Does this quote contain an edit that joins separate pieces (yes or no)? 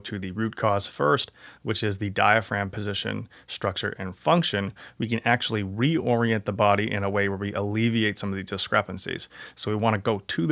no